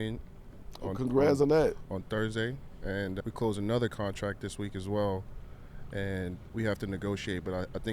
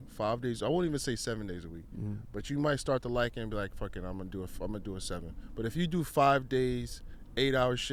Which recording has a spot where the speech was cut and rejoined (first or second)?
first